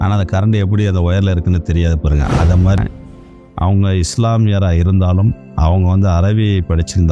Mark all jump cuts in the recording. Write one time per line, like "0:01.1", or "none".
0:02.8